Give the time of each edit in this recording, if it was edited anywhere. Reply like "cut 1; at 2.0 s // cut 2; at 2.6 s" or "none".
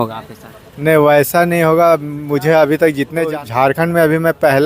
cut 1; at 3.3 s